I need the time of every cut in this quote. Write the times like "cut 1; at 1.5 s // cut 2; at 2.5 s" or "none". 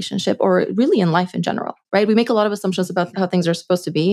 cut 1; at 3.1 s